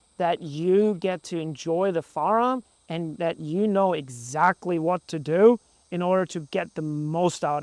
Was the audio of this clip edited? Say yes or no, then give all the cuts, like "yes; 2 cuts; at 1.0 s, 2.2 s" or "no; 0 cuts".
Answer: no; 0 cuts